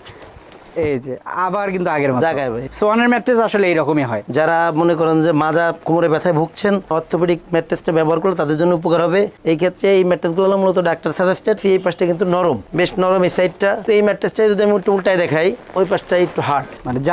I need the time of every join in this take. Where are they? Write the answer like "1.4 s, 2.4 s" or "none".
2.6 s, 4.2 s, 11.6 s, 13.8 s